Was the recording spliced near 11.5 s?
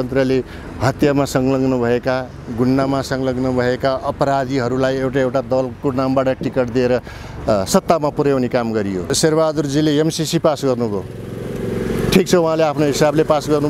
no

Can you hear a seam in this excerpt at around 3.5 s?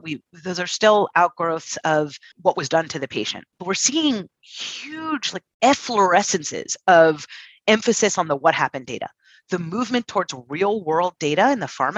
yes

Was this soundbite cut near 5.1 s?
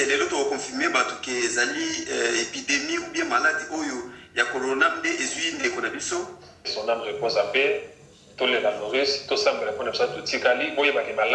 no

